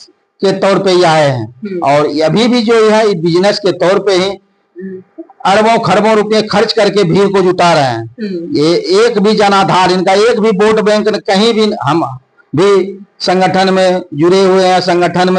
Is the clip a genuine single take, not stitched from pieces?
yes; 0 cuts

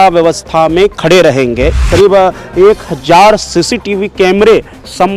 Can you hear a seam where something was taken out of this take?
yes; 1 cut; at 1.8 s

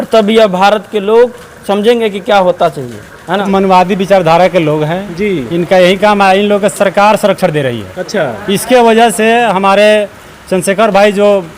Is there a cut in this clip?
yes; 1 cut; at 3.4 s

